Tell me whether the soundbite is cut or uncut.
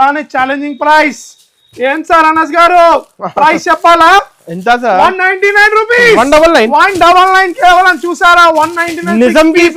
uncut